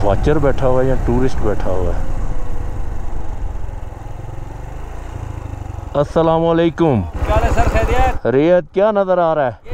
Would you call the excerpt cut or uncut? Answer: uncut